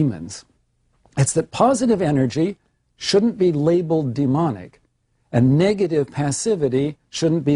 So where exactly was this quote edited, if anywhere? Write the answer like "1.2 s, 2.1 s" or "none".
4.1 s